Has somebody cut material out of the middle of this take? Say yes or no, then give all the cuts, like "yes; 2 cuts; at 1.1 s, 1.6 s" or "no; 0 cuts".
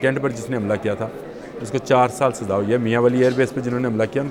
no; 0 cuts